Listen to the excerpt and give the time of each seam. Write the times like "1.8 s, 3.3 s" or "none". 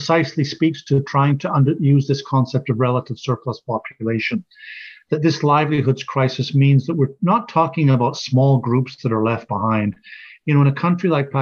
none